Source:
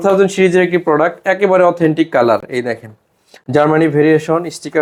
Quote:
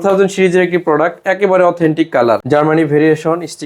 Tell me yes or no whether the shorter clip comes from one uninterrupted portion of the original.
no